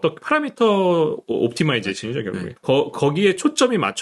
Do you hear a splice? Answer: yes; 1 cut; at 2.5 s

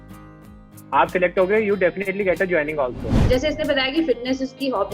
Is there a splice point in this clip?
yes; 1 cut; at 3.2 s

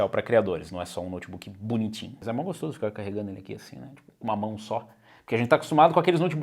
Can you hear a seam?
yes; 1 cut; at 2.2 s

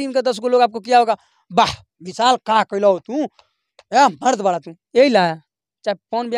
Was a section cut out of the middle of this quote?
no; 0 cuts

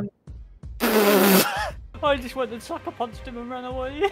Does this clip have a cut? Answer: yes; 1 cut; at 1.8 s

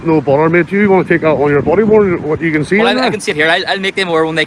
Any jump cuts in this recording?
no; 0 cuts

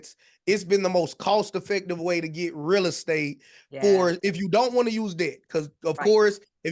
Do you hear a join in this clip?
no; 0 cuts

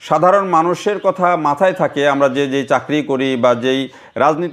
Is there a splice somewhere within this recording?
no; 0 cuts

